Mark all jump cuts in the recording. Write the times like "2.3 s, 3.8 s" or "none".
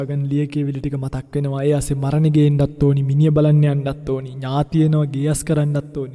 none